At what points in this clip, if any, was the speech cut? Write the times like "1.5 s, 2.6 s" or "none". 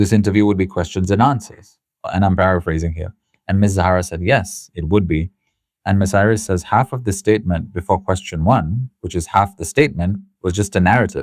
none